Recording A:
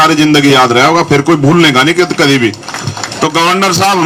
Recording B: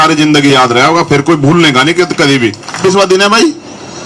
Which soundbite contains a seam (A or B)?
B